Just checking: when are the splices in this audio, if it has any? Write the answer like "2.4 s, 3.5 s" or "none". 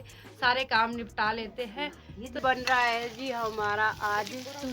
2.4 s